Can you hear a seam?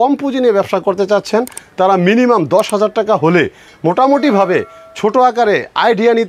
no; 0 cuts

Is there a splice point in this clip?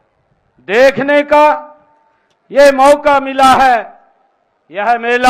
no; 0 cuts

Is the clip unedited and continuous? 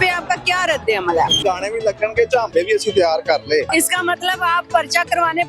no; 2 cuts; at 1.4 s, 3.7 s

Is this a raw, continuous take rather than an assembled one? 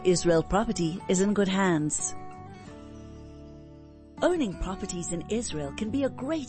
no; 2 cuts; at 1.9 s, 4.1 s

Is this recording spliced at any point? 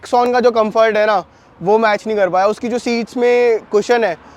no; 0 cuts

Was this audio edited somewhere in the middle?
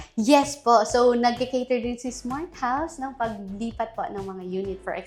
no; 0 cuts

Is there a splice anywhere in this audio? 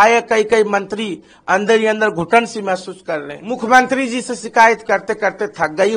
yes; 1 cut; at 3.4 s

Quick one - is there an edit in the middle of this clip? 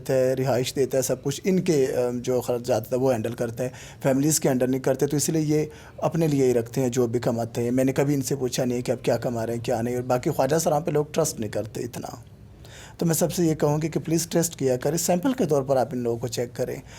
no; 0 cuts

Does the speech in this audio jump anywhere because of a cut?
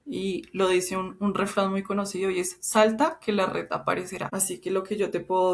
yes; 1 cut; at 4.3 s

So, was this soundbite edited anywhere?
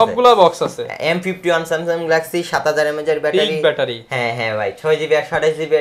no; 0 cuts

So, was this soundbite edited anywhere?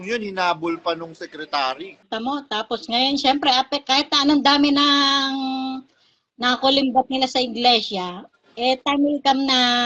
no; 0 cuts

